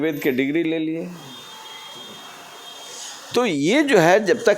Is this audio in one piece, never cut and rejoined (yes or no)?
no